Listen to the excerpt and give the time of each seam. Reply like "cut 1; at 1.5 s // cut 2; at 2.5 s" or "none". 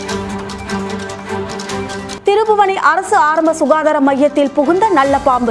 cut 1; at 2.1 s